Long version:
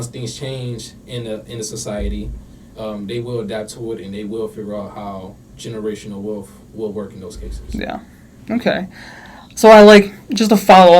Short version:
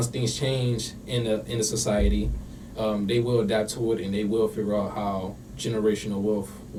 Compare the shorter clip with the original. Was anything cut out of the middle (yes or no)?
no